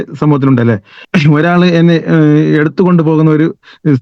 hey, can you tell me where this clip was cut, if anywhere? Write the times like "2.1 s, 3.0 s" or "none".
0.9 s